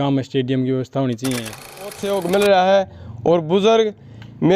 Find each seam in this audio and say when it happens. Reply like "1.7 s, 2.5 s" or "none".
2.0 s